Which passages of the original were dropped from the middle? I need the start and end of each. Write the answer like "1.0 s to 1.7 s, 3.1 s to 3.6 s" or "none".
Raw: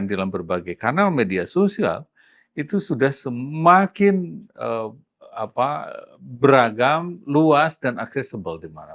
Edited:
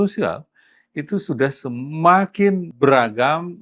4.3 s to 6.3 s